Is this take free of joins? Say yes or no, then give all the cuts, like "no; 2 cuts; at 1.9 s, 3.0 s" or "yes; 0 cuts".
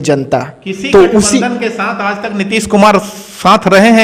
yes; 0 cuts